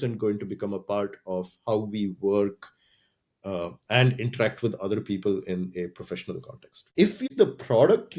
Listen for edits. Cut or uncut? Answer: cut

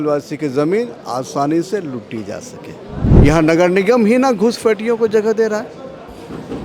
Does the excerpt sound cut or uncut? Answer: cut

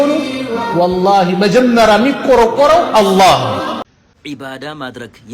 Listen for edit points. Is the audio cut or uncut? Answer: cut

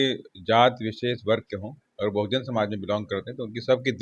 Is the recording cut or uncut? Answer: uncut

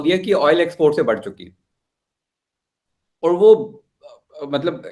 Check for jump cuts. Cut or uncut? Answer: uncut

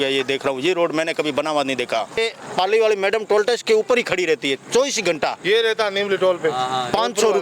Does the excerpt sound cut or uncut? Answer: cut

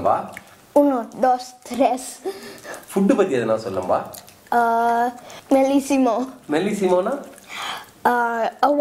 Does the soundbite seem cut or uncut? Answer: uncut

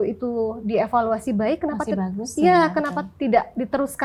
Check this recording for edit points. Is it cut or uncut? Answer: uncut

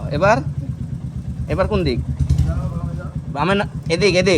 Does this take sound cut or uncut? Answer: uncut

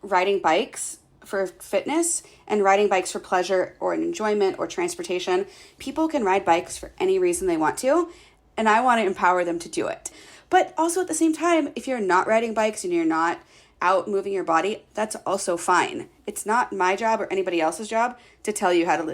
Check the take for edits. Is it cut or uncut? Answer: cut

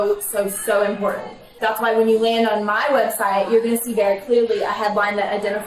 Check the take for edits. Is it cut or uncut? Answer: cut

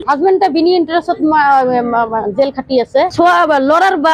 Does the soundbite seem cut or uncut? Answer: cut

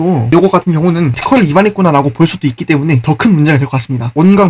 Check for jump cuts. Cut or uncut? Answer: uncut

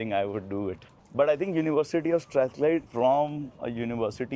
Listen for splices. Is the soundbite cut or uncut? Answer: uncut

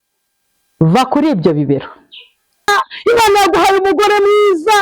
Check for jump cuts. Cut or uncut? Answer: cut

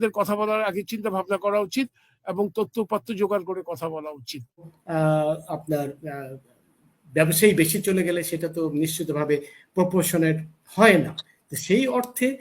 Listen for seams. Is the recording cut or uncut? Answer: cut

